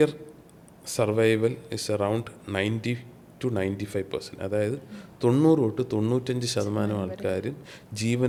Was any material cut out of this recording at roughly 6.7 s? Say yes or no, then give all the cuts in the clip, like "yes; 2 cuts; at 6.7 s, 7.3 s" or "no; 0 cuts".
no; 0 cuts